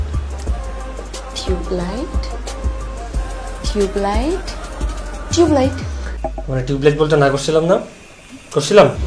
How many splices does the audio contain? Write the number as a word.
zero